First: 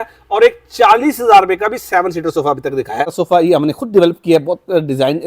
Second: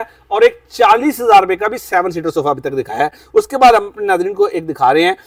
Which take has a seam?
first; 1 cut; at 3.2 s

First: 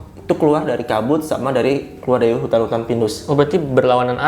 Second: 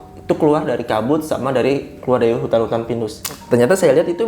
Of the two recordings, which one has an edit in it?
second; 1 cut; at 3.1 s

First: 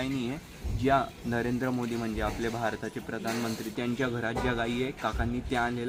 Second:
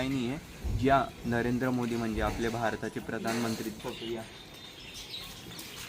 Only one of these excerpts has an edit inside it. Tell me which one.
second; 1 cut; at 3.7 s

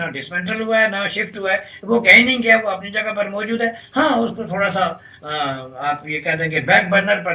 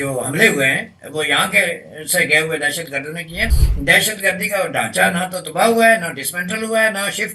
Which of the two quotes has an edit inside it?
second; 1 cut; at 3.6 s

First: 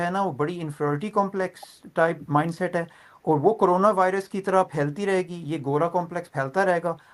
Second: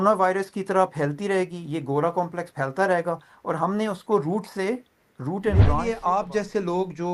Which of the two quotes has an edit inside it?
second; 1 cut; at 5.8 s

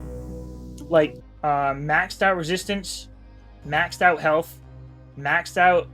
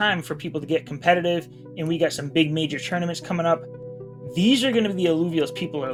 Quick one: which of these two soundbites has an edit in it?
first; 1 cut; at 1.2 s

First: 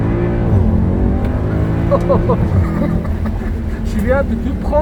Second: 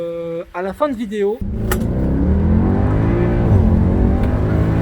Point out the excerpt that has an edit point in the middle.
second; 1 cut; at 1.4 s

